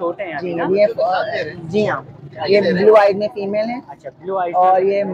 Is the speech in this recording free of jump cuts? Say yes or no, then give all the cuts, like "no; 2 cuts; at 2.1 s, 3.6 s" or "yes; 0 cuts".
yes; 0 cuts